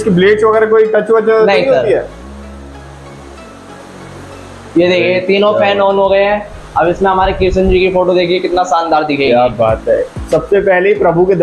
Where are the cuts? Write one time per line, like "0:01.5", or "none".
none